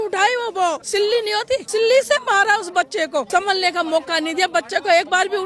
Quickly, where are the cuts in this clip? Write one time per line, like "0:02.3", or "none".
0:01.1
0:03.3